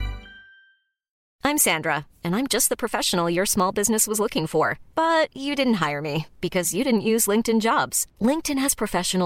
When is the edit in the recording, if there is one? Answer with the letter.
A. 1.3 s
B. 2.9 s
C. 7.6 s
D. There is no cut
A